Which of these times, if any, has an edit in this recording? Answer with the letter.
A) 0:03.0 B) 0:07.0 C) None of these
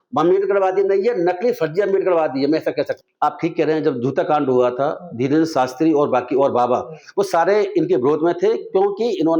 A